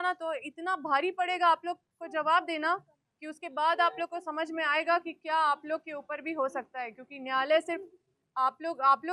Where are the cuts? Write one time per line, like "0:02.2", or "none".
none